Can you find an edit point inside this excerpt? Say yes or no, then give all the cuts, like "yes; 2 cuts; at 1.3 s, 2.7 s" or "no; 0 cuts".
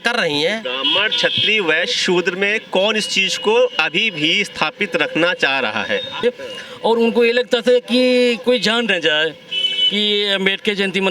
yes; 1 cut; at 6.2 s